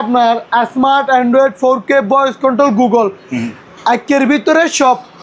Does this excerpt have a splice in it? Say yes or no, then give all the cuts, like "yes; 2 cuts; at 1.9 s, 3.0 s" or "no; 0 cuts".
no; 0 cuts